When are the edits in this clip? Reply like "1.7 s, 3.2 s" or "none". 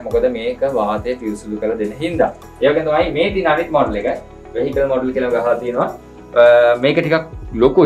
none